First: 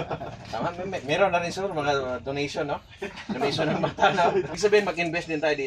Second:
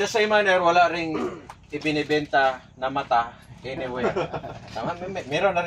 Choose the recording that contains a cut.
first; 1 cut; at 4.5 s

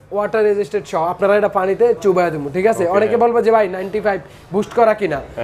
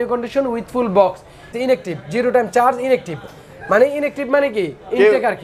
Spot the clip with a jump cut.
second; 1 cut; at 1.5 s

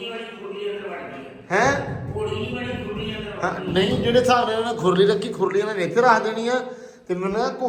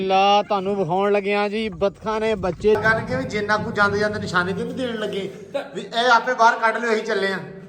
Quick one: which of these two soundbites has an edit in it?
second; 1 cut; at 2.8 s

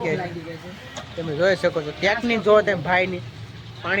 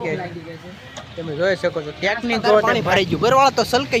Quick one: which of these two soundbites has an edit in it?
second; 1 cut; at 2.8 s

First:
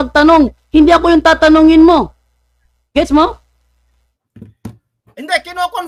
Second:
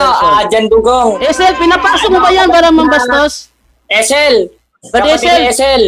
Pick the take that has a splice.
second; 1 cut; at 1.2 s

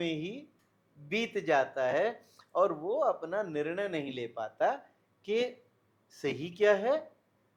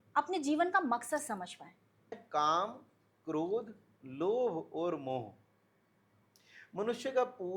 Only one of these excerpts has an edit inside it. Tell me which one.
second; 1 cut; at 2.2 s

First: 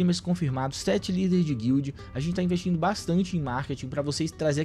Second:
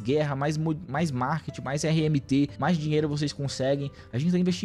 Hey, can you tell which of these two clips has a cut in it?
second; 1 cut; at 2.5 s

